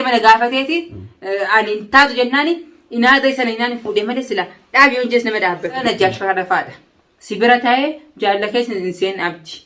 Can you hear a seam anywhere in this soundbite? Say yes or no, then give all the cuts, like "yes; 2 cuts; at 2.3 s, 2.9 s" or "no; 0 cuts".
yes; 1 cut; at 5.8 s